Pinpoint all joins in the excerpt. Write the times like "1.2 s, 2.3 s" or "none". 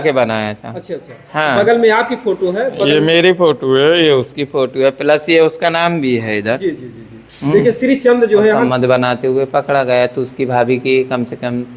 8.6 s